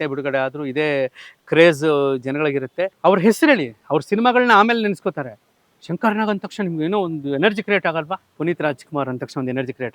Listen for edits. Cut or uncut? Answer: cut